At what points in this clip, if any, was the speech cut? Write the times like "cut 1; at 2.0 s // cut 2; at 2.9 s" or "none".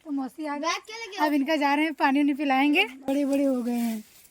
cut 1; at 3.1 s